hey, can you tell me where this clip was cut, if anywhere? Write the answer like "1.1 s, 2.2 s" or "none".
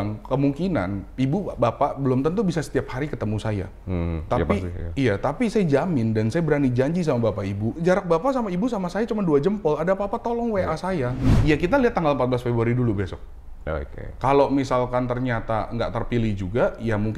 7.7 s, 11.3 s